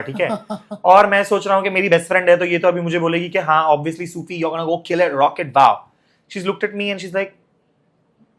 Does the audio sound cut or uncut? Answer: uncut